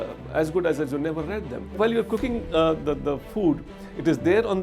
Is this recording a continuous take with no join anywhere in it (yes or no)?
no